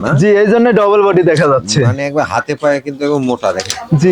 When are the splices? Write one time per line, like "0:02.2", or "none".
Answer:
none